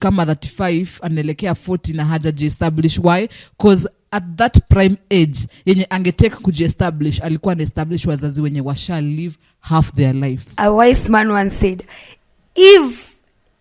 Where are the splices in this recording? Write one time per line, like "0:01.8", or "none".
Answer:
0:10.5